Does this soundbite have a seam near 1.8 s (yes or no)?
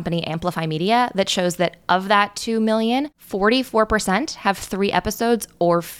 no